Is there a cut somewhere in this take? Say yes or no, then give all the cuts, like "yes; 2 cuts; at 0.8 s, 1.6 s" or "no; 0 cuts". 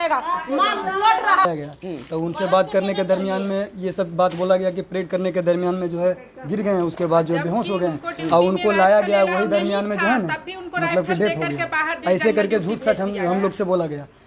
yes; 1 cut; at 1.5 s